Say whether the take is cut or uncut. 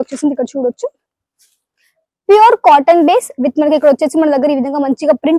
uncut